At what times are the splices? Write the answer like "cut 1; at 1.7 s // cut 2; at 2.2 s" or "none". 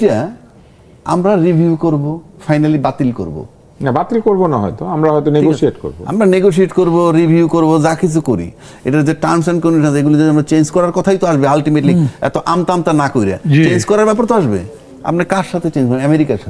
none